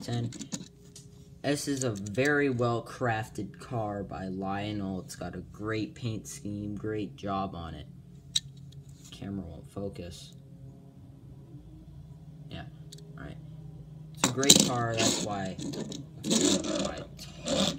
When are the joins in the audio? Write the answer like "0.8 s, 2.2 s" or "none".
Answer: 13.0 s